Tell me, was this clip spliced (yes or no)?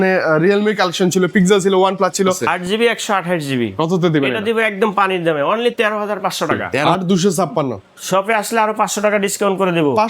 yes